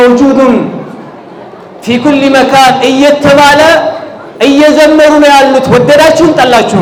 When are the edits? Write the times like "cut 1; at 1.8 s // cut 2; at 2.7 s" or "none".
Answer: none